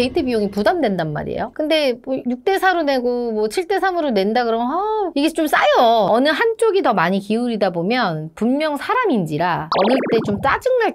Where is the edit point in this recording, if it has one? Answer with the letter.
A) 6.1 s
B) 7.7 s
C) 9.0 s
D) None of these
A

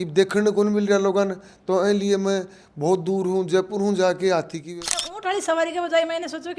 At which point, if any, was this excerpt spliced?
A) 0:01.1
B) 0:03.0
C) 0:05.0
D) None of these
C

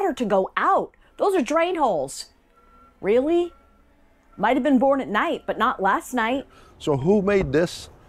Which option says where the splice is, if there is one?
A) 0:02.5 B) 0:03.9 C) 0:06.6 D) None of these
C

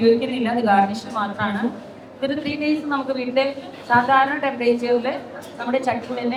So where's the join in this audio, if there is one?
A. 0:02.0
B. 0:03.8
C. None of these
C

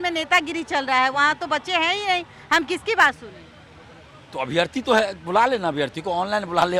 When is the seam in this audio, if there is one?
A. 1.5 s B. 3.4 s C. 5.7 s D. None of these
D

